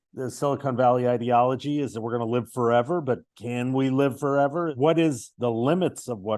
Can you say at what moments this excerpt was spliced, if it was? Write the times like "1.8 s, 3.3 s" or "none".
4.7 s